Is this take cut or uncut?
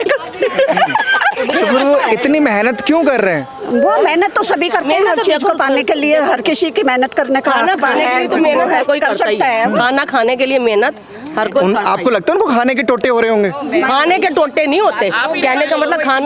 uncut